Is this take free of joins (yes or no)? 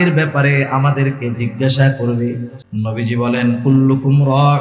no